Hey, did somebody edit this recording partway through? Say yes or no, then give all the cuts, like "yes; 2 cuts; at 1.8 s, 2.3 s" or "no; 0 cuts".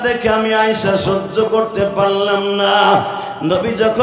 no; 0 cuts